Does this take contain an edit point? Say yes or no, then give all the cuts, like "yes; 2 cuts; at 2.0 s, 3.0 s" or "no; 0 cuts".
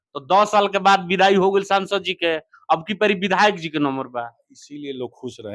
no; 0 cuts